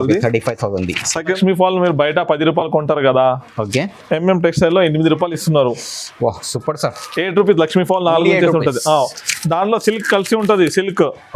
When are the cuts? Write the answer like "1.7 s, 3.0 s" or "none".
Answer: 1.4 s